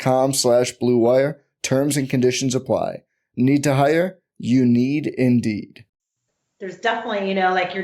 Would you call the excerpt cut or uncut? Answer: cut